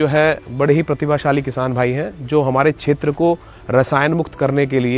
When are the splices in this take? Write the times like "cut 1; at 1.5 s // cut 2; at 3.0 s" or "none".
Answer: none